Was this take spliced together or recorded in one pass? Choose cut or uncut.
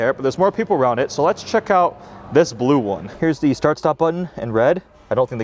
cut